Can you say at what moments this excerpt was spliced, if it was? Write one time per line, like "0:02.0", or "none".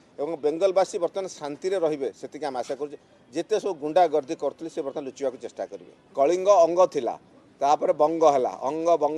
0:05.9